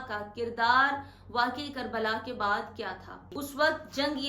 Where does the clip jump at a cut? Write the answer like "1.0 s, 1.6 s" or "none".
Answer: 3.2 s